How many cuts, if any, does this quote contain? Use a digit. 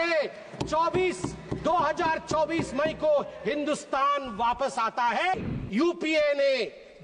1